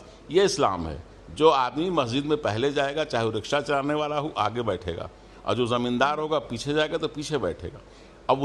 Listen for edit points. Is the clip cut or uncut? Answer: uncut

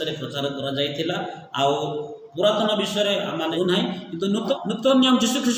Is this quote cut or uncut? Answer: cut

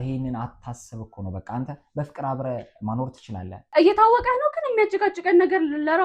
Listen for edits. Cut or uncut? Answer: cut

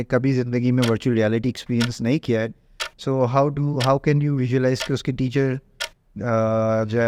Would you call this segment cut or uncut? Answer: uncut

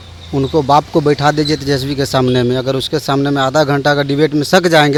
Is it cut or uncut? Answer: uncut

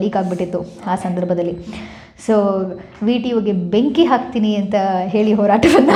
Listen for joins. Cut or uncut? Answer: uncut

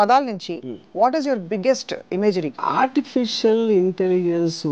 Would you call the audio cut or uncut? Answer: cut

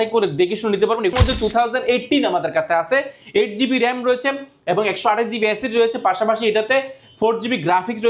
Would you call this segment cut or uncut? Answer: cut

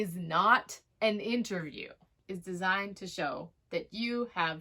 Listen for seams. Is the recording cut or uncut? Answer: cut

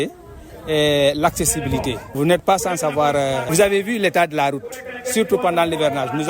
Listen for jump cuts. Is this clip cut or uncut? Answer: cut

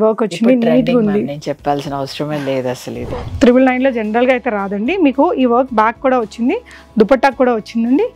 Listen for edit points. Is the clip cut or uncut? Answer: cut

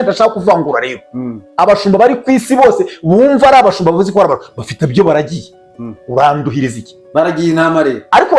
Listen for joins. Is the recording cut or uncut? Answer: uncut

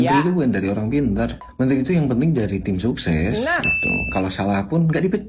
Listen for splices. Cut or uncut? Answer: cut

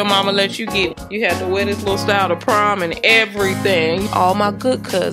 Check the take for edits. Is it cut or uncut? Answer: cut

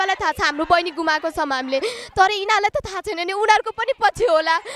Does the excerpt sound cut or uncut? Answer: uncut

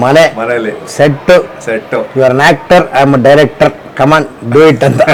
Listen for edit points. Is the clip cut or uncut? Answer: uncut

